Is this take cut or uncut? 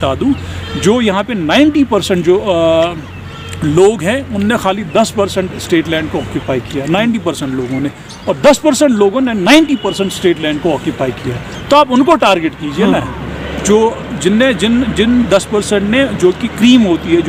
uncut